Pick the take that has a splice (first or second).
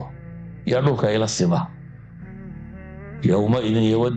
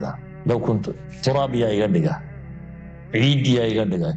first